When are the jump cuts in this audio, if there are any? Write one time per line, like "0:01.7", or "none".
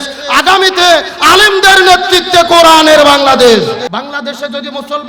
0:03.9